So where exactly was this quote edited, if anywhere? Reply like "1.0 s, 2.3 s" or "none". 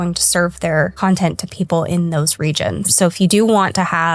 0.9 s, 2.9 s